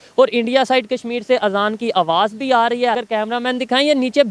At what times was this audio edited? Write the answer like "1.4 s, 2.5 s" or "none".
3.0 s